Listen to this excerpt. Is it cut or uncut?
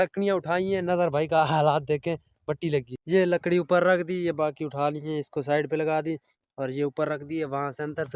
cut